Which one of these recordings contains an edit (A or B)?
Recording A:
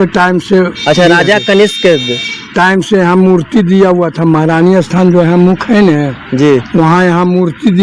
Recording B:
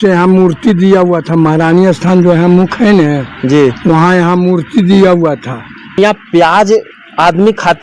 B